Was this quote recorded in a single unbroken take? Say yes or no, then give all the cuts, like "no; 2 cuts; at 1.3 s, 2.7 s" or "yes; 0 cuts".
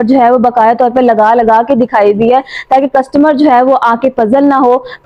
yes; 0 cuts